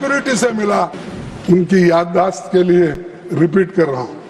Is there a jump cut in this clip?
yes; 1 cut; at 1.0 s

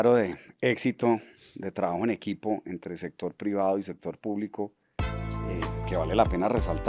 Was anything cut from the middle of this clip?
no; 0 cuts

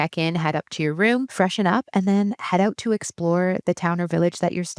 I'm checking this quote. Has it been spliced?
yes; 1 cut; at 1.3 s

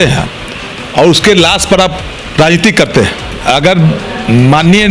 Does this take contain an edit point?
yes; 1 cut; at 3.3 s

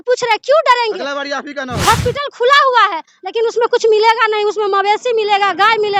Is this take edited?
yes; 1 cut; at 1.8 s

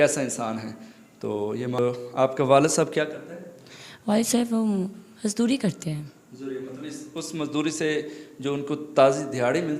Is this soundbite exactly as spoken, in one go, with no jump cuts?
no; 1 cut; at 1.8 s

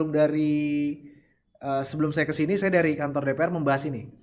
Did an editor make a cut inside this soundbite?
no; 0 cuts

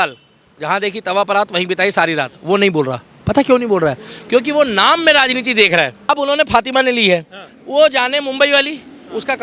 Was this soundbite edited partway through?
yes; 1 cut; at 6.0 s

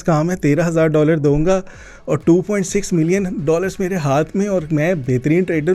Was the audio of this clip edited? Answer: no; 0 cuts

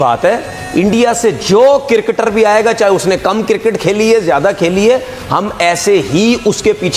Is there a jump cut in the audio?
no; 0 cuts

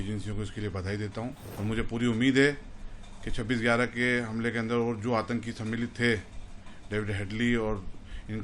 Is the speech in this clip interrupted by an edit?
yes; 1 cut; at 1.5 s

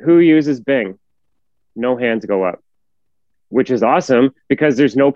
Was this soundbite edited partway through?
no; 0 cuts

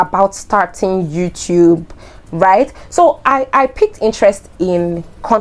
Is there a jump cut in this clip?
no; 0 cuts

